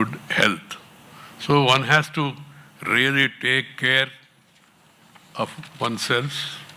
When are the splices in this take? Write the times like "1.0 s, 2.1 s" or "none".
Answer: none